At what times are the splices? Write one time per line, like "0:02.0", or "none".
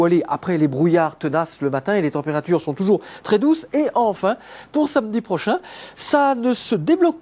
none